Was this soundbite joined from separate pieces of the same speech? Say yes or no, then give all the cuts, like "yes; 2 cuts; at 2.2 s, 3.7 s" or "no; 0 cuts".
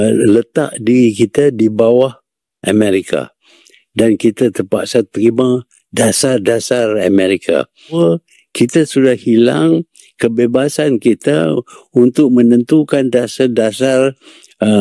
yes; 1 cut; at 7.9 s